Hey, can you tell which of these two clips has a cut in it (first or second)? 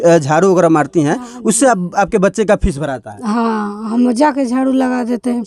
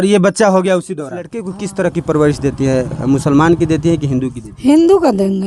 second